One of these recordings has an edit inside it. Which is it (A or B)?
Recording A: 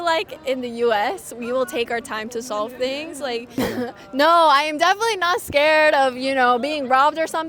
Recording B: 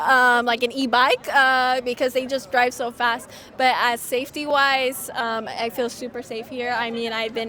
A